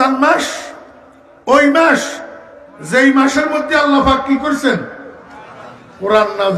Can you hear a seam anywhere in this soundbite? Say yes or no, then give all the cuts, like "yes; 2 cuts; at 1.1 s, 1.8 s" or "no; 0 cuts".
no; 0 cuts